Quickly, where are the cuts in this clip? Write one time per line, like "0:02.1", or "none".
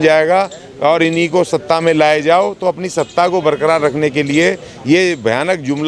none

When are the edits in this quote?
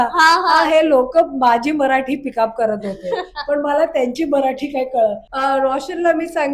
0:05.3

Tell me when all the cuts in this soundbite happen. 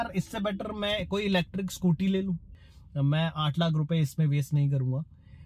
none

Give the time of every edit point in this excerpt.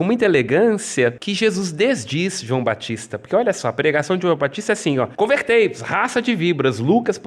0:01.2
0:05.1

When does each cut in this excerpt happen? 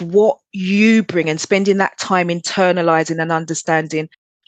none

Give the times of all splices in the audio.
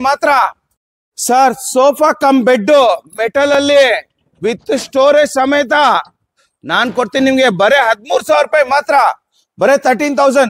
none

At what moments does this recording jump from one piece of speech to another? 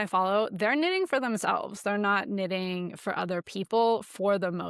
none

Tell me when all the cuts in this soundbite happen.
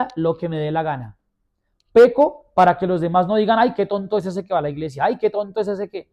none

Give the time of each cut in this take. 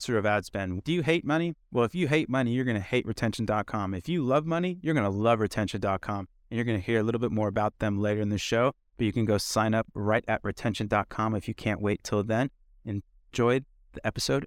none

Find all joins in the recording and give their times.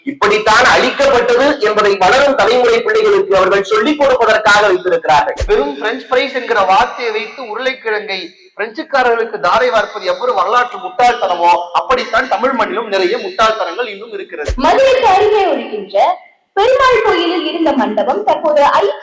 0:05.4
0:14.4

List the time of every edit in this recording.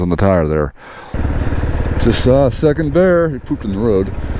0:01.1

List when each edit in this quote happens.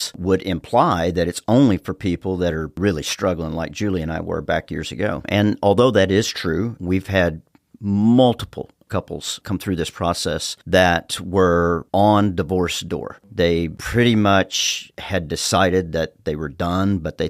0:02.7
0:08.8
0:10.5

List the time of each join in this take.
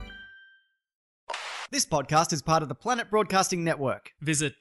0:01.1

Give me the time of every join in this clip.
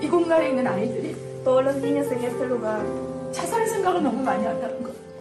none

